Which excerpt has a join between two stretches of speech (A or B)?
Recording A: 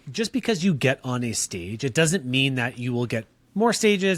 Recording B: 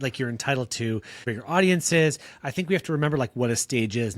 B